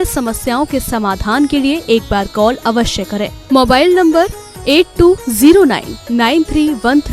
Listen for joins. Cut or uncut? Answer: uncut